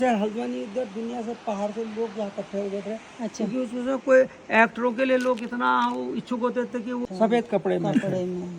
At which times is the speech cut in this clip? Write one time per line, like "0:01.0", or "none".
0:07.1